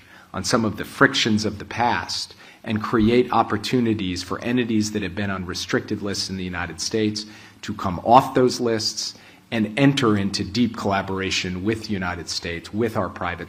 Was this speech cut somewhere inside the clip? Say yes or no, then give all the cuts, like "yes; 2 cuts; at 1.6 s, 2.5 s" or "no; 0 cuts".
no; 0 cuts